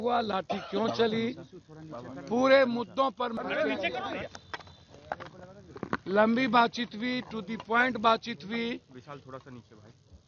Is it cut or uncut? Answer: cut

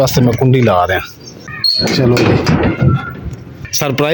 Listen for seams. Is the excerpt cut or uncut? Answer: uncut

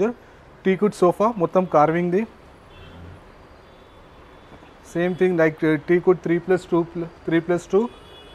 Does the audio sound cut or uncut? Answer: uncut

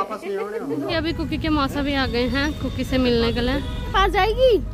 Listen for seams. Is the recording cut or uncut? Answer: cut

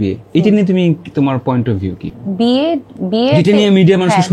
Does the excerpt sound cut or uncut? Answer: uncut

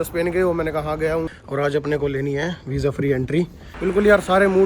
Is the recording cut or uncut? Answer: cut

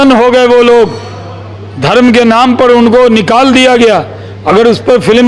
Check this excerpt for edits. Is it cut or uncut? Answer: uncut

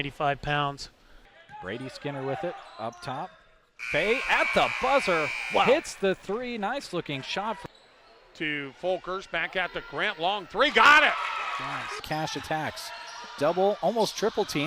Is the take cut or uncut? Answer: uncut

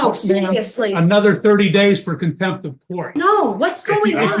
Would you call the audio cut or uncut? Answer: cut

